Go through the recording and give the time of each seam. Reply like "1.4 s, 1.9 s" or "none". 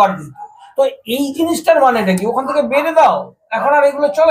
none